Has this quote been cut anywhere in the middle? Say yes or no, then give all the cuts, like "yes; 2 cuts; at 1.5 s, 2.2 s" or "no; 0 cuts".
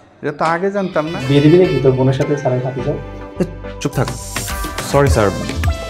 yes; 1 cut; at 1.2 s